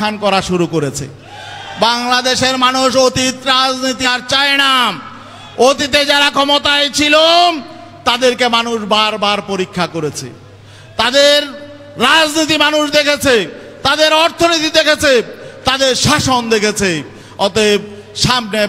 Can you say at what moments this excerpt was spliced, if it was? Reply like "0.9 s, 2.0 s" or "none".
none